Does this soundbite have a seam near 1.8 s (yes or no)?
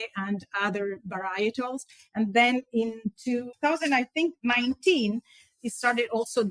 no